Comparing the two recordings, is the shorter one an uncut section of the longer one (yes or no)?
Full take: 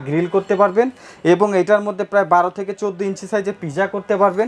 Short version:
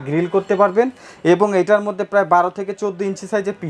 yes